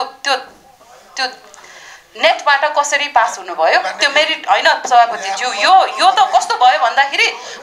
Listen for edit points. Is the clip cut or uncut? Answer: uncut